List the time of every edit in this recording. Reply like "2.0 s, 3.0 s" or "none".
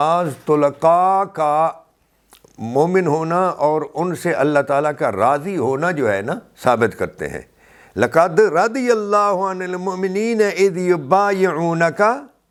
none